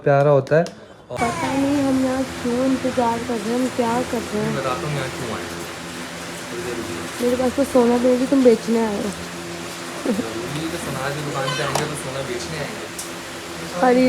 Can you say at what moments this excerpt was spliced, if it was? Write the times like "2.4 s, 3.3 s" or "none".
1.0 s